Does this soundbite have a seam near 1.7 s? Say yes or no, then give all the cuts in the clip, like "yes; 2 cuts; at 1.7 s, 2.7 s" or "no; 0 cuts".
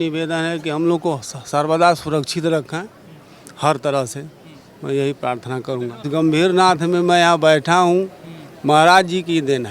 no; 1 cut; at 6.1 s